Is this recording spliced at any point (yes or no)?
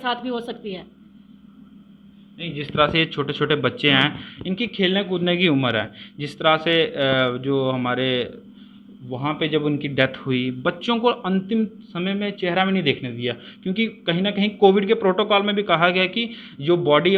no